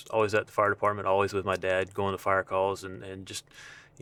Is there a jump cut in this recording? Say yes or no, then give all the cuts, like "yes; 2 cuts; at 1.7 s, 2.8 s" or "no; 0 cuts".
no; 0 cuts